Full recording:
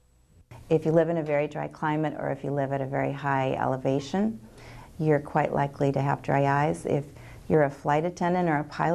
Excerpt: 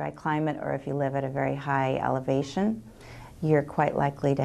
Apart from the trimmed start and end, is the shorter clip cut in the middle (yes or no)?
no